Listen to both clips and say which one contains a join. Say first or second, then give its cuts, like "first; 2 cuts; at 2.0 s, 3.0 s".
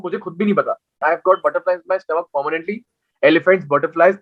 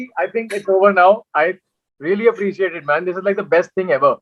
first; 1 cut; at 1.0 s